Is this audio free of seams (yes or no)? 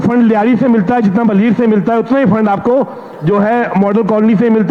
yes